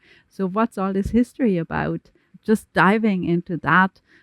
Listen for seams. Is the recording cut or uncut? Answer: cut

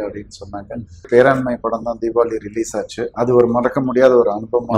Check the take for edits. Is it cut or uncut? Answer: cut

